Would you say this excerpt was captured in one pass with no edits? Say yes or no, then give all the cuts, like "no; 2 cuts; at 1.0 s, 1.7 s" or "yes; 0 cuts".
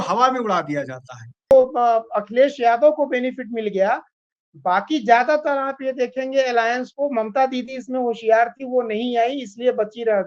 no; 1 cut; at 1.5 s